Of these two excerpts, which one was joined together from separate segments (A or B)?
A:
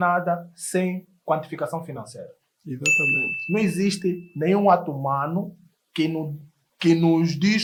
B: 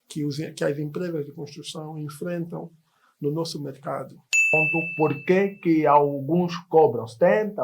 B